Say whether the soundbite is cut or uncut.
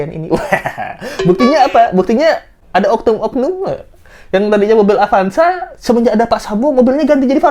uncut